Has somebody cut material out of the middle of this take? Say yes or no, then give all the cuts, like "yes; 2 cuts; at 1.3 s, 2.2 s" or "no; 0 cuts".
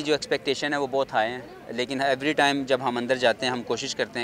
no; 0 cuts